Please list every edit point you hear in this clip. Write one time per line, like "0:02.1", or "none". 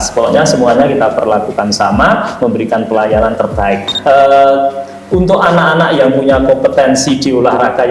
0:03.9